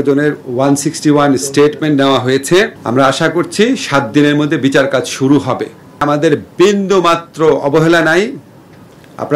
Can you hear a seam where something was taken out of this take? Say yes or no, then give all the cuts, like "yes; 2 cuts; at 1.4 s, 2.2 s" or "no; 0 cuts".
yes; 2 cuts; at 2.8 s, 6.0 s